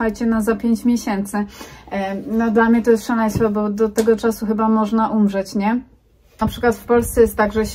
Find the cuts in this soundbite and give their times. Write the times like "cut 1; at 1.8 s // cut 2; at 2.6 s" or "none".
cut 1; at 6.4 s